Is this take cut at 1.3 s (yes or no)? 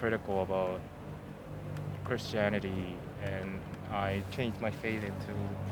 no